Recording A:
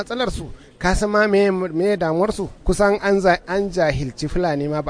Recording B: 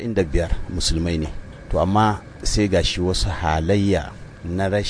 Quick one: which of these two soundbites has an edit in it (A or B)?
A